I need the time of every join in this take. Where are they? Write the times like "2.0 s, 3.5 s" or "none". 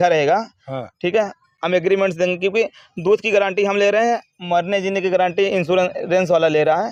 none

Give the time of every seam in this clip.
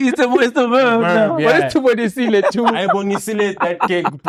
none

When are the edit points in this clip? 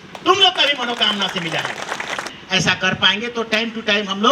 2.3 s

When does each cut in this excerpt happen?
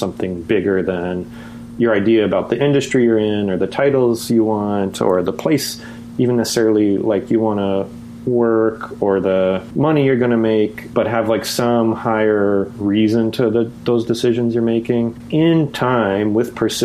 15.2 s

